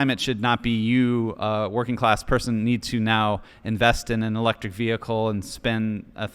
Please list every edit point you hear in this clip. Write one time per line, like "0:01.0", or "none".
none